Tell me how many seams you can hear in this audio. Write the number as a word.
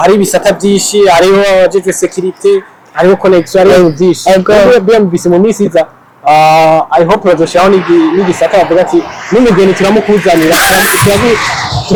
zero